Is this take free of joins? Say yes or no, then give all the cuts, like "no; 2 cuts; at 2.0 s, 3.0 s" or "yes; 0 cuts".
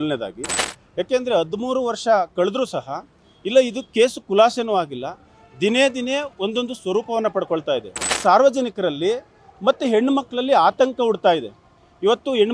no; 1 cut; at 8.1 s